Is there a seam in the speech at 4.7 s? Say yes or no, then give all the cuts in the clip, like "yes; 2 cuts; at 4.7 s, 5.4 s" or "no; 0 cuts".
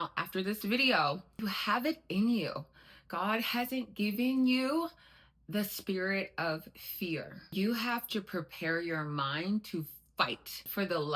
no; 2 cuts; at 1.3 s, 7.3 s